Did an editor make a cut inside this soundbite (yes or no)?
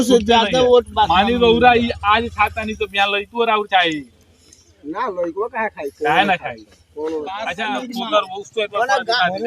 yes